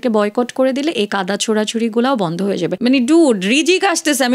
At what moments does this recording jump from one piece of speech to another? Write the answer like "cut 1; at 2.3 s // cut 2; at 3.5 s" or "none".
cut 1; at 2.8 s